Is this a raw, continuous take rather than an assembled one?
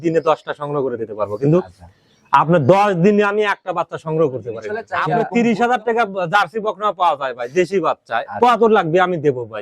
no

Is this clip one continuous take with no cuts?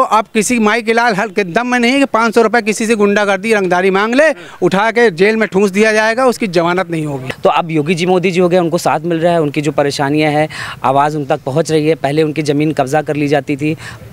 no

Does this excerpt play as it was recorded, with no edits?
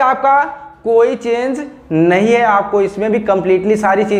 yes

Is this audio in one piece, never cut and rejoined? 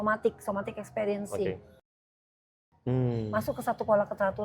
no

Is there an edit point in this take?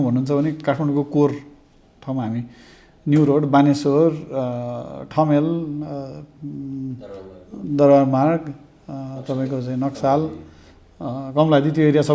no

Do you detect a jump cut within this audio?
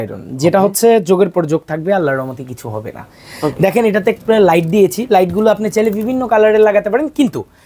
no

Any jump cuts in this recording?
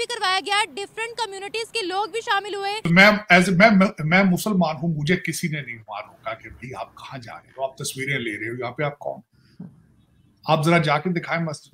yes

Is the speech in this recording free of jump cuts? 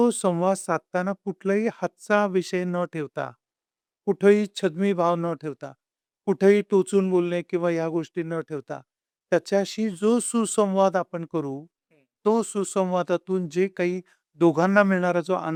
yes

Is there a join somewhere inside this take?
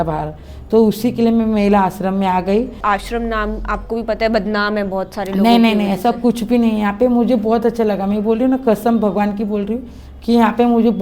yes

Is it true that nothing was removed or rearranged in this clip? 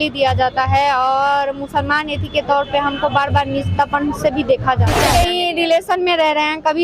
no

